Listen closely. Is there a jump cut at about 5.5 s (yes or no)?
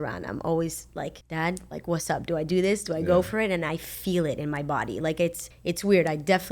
yes